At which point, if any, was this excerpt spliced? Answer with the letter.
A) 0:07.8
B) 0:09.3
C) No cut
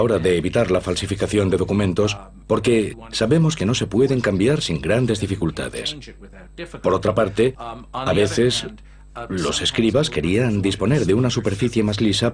B